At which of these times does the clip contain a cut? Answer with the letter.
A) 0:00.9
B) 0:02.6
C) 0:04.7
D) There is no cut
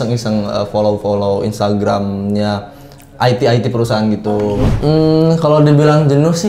C